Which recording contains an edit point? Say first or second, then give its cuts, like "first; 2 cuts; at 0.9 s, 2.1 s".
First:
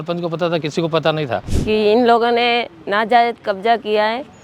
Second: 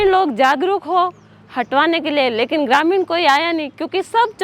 first; 1 cut; at 1.5 s